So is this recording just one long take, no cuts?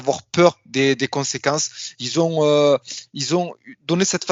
yes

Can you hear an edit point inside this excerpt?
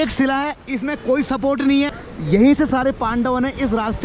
no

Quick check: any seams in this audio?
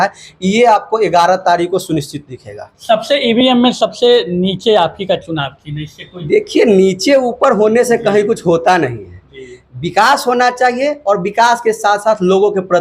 no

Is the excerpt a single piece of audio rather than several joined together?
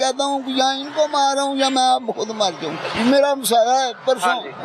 no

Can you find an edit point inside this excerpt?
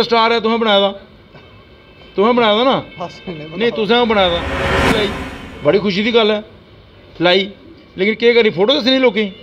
yes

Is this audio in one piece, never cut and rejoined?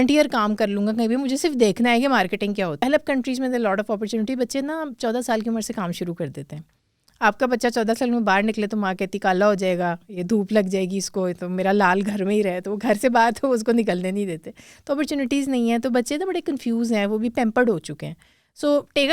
no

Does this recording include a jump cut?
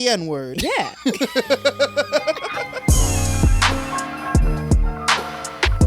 yes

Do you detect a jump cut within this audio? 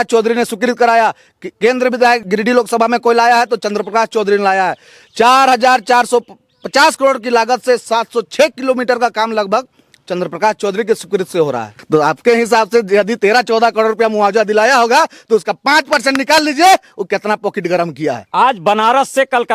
yes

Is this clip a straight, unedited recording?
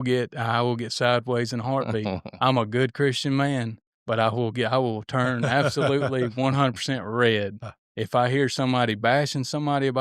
yes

